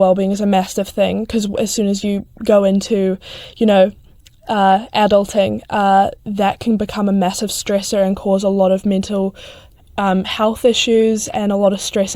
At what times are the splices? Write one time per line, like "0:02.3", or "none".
none